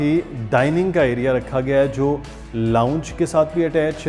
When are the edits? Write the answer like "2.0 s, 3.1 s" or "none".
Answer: none